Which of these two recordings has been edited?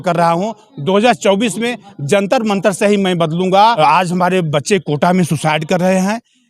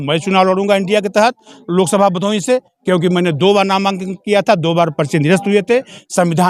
first; 1 cut; at 3.8 s

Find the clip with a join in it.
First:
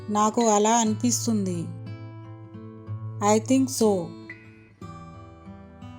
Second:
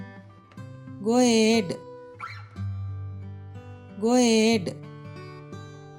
second; 4 cuts; at 0.8 s, 2.0 s, 3.8 s, 5.0 s

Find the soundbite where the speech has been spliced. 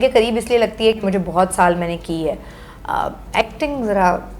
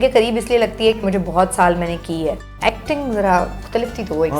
second; 2 cuts; at 2.5 s, 3.6 s

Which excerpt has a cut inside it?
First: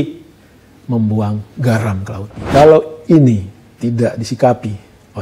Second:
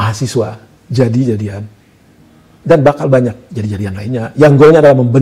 first; 1 cut; at 2.4 s

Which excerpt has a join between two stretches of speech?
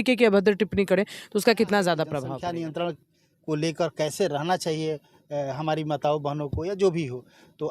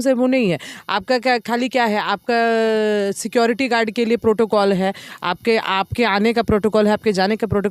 first; 1 cut; at 2.2 s

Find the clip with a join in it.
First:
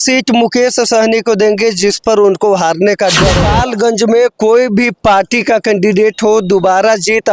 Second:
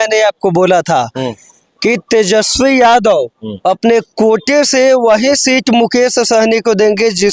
first; 1 cut; at 3.5 s

